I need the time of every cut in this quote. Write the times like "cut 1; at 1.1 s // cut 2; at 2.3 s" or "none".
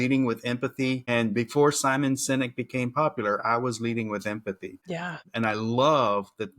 cut 1; at 5.1 s